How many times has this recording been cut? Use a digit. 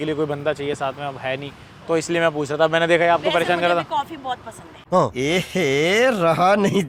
0